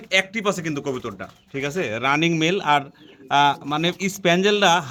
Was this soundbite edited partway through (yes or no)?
no